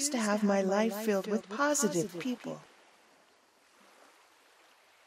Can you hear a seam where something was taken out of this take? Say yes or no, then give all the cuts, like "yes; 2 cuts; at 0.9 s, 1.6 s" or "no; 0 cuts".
yes; 1 cut; at 3.4 s